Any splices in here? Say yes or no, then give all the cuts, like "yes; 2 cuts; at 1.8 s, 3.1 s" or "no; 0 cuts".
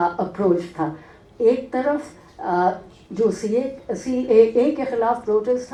no; 0 cuts